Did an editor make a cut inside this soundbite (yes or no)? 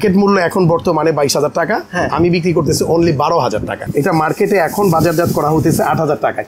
yes